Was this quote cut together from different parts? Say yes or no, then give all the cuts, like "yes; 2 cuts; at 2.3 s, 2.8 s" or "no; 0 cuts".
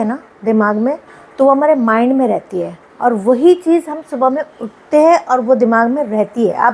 no; 0 cuts